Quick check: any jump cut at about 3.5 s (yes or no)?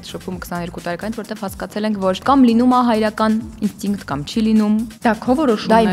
no